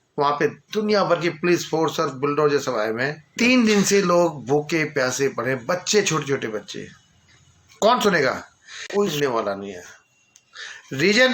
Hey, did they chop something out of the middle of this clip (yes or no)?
yes